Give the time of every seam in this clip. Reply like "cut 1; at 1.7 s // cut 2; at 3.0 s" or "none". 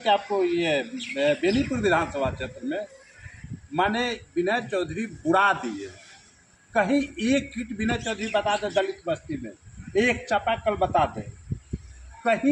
none

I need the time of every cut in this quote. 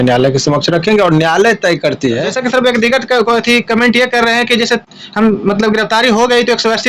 cut 1; at 2.3 s

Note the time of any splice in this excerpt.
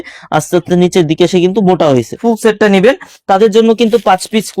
cut 1; at 2.2 s

